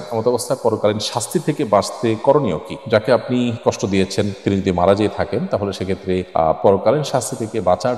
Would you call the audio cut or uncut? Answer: uncut